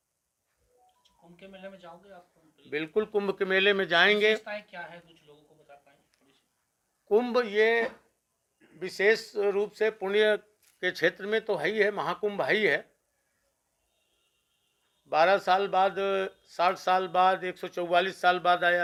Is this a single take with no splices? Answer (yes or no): yes